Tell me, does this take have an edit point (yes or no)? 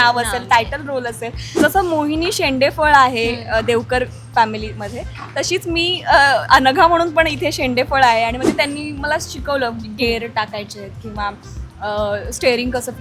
yes